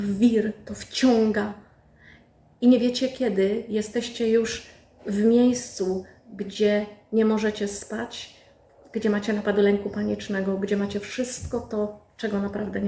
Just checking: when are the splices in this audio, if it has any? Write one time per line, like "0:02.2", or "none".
none